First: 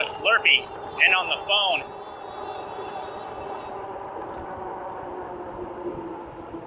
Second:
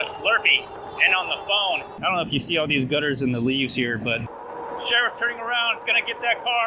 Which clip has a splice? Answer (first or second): second